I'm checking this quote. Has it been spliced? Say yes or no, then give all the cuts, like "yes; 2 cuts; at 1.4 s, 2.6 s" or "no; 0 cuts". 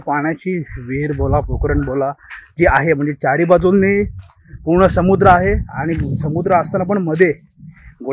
no; 0 cuts